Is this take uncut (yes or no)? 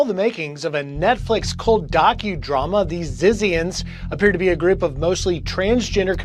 yes